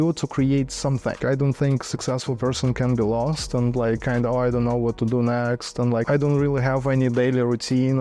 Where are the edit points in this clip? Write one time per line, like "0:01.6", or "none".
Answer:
0:01.2
0:06.0

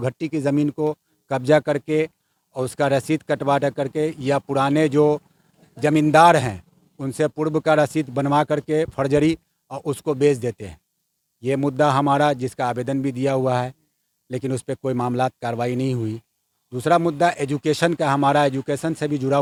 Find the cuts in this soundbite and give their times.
none

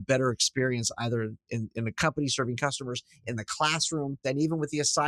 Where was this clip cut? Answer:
0:04.2

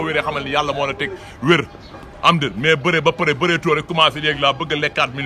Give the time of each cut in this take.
none

